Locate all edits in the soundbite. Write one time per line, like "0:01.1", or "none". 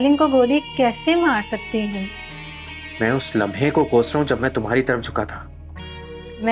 none